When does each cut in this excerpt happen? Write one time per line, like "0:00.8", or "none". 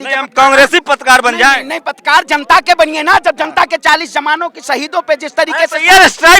none

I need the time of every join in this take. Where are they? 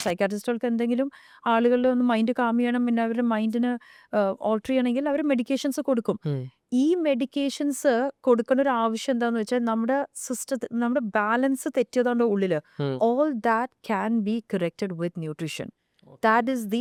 none

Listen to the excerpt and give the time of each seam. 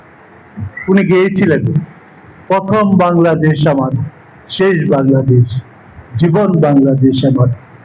none

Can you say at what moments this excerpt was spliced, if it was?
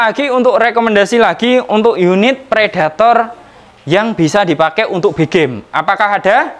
none

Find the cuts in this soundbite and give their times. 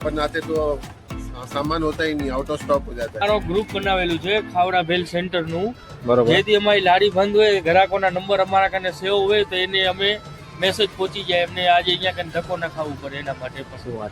0:03.2

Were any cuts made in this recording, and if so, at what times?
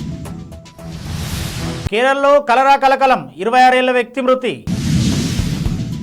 0:01.4

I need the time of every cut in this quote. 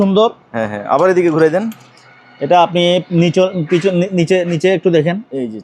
none

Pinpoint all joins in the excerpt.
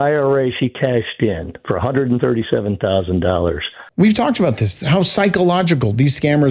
0:03.8

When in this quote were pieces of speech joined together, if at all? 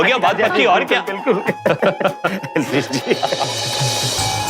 none

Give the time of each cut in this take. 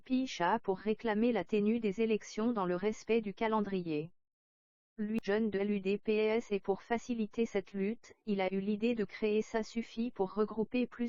0:05.8

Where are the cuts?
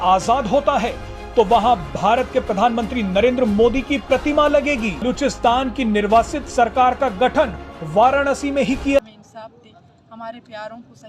0:05.0
0:09.0

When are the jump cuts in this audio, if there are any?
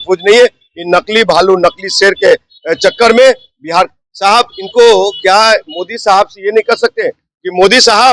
none

